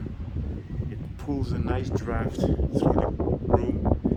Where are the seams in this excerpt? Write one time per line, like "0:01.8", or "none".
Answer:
none